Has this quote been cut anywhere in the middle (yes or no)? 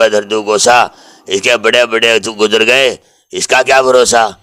no